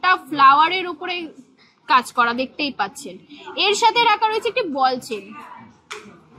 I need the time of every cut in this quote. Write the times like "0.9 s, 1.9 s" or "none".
none